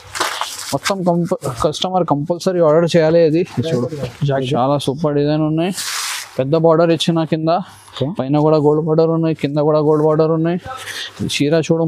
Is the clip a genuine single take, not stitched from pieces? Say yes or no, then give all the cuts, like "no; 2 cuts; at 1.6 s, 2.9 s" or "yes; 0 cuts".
no; 1 cut; at 4.4 s